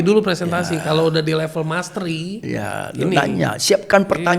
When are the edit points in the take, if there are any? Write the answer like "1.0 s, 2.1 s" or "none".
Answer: none